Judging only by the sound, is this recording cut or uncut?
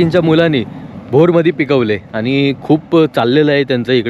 uncut